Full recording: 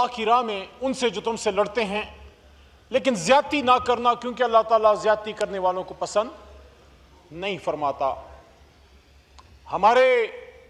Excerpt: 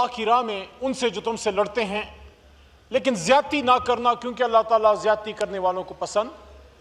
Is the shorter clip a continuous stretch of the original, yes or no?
yes